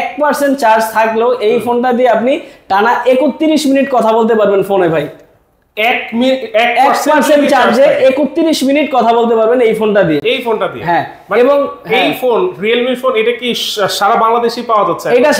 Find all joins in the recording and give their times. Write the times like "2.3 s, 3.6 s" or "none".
none